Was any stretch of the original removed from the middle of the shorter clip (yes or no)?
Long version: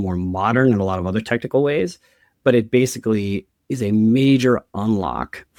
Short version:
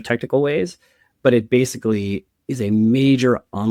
no